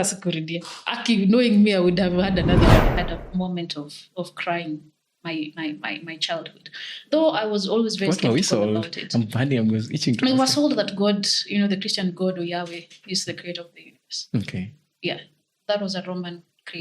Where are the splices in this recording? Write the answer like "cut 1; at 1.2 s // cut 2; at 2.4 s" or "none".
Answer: cut 1; at 2.9 s